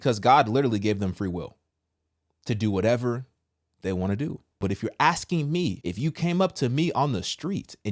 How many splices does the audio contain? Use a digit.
2